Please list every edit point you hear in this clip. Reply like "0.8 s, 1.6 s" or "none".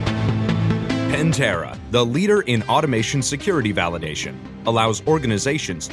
1.2 s